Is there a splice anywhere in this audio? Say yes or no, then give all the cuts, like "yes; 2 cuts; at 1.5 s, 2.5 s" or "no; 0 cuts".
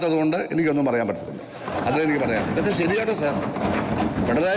no; 0 cuts